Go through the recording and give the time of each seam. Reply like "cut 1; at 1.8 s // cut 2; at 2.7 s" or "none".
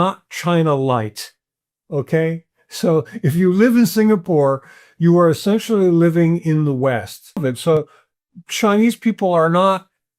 cut 1; at 7.4 s